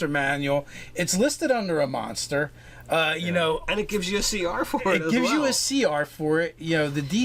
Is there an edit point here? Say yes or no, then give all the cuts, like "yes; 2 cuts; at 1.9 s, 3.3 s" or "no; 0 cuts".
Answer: no; 0 cuts